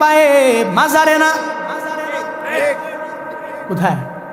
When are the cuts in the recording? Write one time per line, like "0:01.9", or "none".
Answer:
none